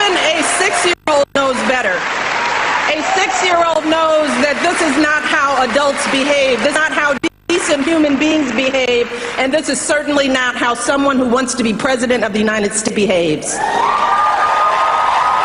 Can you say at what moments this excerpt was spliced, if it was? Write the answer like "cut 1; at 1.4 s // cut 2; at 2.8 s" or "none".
cut 1; at 1.3 s